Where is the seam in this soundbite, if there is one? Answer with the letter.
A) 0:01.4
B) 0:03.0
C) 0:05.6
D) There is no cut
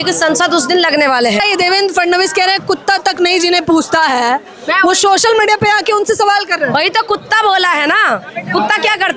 A